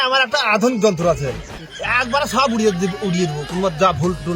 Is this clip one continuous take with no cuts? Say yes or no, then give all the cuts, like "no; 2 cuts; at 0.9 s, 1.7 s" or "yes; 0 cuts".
yes; 0 cuts